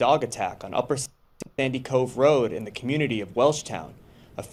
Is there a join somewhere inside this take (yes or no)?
no